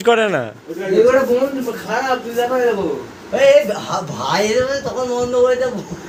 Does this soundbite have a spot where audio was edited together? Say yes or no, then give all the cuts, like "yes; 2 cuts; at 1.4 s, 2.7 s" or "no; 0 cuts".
no; 0 cuts